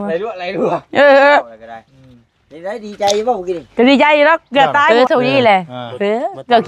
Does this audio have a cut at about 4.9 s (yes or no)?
yes